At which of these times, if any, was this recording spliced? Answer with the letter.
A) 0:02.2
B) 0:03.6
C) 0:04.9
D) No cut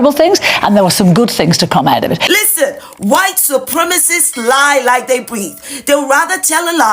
A